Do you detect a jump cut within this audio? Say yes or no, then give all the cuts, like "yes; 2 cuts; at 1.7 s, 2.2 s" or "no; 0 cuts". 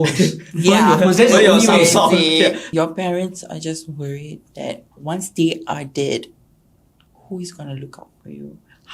yes; 1 cut; at 2.6 s